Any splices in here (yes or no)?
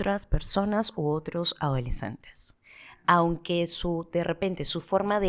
no